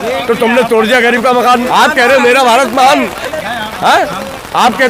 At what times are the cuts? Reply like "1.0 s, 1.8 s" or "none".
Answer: 1.7 s